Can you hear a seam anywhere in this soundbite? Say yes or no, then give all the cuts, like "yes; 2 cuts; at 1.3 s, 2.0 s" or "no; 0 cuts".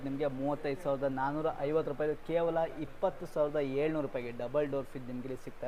no; 0 cuts